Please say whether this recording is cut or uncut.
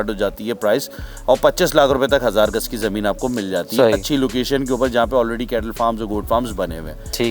uncut